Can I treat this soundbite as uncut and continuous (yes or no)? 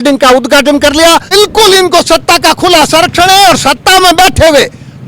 no